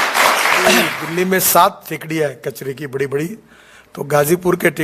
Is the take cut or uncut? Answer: cut